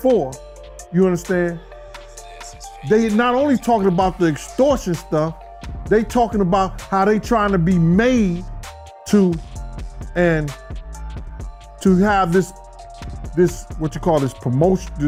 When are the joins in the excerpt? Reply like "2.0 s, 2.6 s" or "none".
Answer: none